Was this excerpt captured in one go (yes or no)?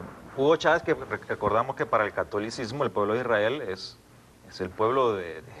no